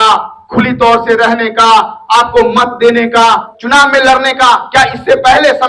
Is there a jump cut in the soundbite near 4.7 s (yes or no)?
no